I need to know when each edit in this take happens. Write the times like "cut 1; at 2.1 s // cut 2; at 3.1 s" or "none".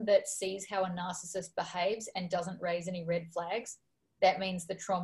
none